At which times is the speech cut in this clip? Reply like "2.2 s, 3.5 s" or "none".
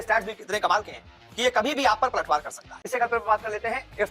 2.8 s

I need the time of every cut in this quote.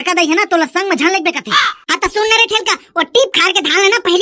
1.8 s

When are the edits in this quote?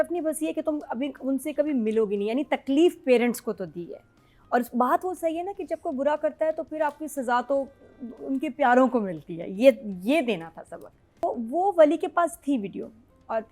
11.2 s

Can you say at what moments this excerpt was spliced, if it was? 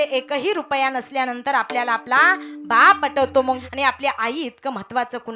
3.6 s

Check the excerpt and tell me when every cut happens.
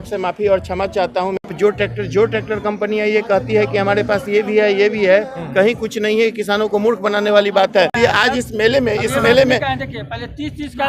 1.5 s, 8.0 s

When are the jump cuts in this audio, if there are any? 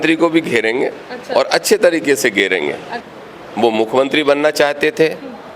3.0 s

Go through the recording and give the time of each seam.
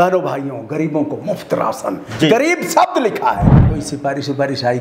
3.6 s

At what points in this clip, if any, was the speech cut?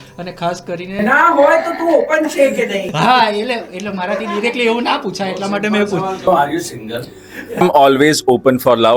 none

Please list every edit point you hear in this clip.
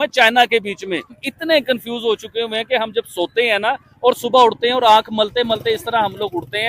1.2 s

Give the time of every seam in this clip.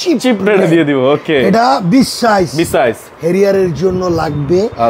none

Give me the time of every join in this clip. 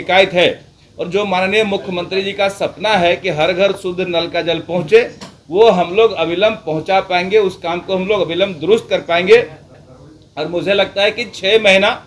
none

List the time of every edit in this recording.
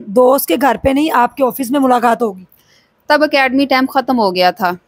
none

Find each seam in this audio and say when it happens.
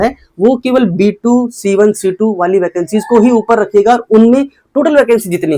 none

